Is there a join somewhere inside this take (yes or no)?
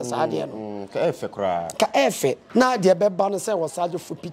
yes